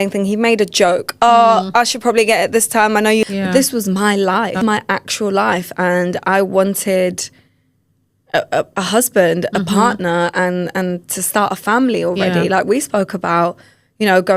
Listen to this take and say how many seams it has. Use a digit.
2